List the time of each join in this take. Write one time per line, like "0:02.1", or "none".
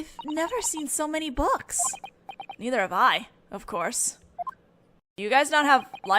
0:02.9